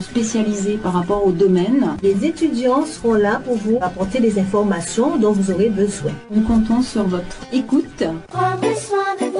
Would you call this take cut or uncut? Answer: cut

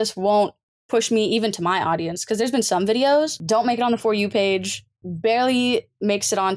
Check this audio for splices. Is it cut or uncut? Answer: cut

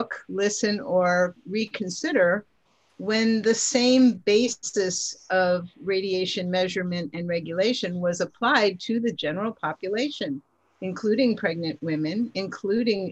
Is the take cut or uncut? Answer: uncut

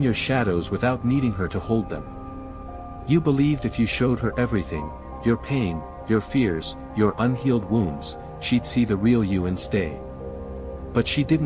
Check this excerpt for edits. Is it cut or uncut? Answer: uncut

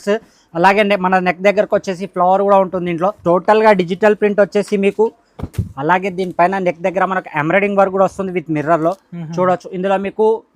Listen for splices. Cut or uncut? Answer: cut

